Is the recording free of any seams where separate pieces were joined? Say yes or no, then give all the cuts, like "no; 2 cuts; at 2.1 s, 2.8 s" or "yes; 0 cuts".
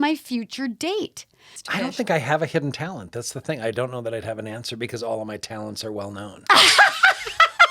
no; 1 cut; at 1.6 s